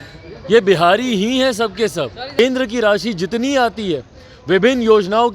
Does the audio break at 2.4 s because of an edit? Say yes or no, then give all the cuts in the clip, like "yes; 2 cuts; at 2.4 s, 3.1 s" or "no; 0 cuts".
yes; 1 cut; at 2.4 s